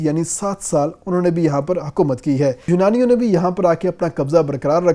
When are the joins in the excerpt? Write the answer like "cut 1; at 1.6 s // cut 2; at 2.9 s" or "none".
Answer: cut 1; at 2.6 s